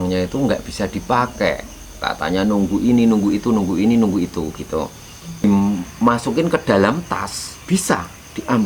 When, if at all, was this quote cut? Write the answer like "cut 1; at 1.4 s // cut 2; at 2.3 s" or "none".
cut 1; at 5.4 s